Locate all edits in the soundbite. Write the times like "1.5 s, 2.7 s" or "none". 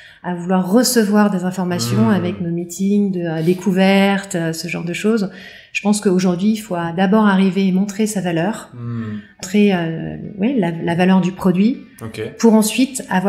9.4 s